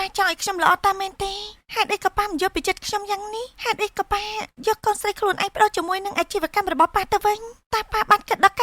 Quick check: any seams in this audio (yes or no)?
no